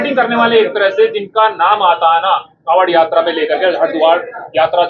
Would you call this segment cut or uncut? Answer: uncut